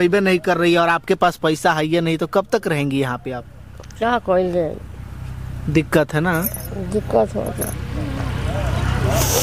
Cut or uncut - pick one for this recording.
uncut